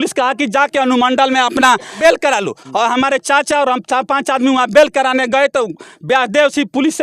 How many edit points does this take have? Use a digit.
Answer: 1